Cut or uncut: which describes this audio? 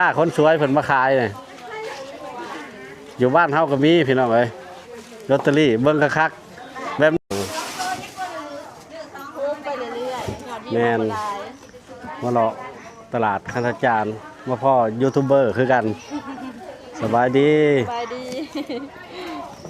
cut